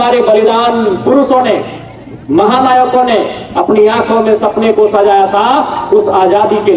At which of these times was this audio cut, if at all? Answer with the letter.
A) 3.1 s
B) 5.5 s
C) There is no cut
C